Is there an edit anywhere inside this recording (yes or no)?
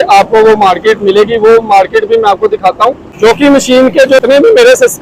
yes